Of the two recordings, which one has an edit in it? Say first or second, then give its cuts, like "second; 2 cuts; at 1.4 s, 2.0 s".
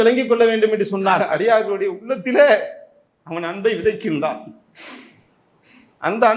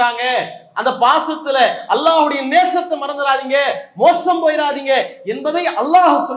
first; 1 cut; at 1.2 s